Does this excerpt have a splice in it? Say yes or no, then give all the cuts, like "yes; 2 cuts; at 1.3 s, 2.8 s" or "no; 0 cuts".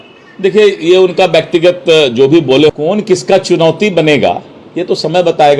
yes; 1 cut; at 2.7 s